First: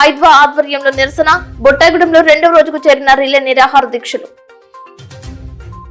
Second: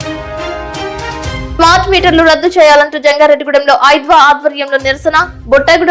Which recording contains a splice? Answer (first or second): second